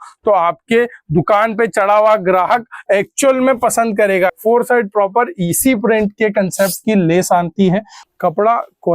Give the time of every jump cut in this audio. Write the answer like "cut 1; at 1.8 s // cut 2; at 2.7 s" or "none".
cut 1; at 4.3 s // cut 2; at 8.0 s